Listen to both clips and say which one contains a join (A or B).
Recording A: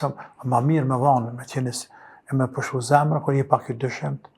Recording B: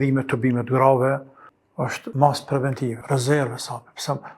B